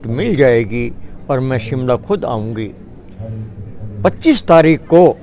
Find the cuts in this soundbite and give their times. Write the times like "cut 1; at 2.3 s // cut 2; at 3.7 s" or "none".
none